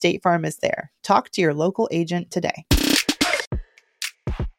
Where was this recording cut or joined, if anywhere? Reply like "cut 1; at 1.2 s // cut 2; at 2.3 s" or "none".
cut 1; at 3.5 s